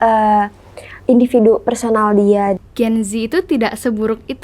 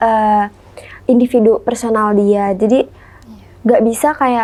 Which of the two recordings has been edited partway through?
first; 1 cut; at 2.6 s

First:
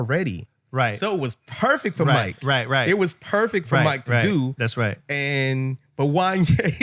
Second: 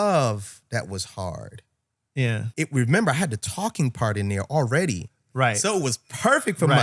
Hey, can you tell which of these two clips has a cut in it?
second; 1 cut; at 2.4 s

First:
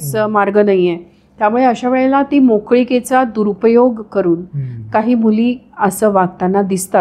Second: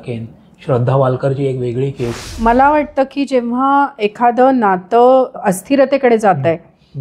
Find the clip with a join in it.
second; 2 cuts; at 2.3 s, 5.3 s

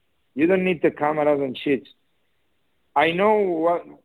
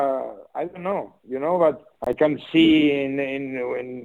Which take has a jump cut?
second; 1 cut; at 1.9 s

